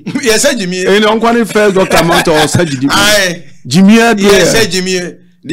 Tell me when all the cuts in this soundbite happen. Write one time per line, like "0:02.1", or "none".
none